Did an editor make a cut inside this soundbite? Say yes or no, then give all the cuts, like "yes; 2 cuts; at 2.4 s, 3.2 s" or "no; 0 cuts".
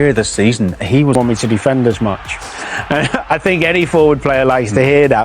yes; 1 cut; at 1.2 s